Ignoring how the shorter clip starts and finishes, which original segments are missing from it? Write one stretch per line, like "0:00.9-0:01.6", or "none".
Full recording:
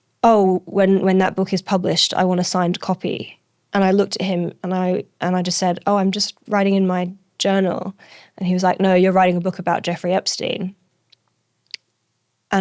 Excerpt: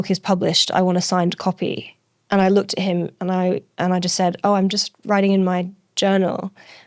none